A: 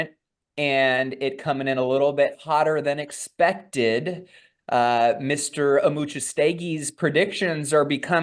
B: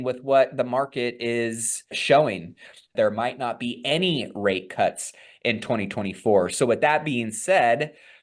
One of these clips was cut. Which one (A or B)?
B